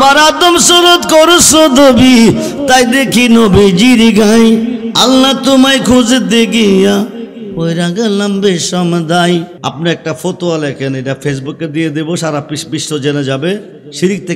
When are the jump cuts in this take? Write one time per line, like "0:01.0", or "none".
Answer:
0:09.6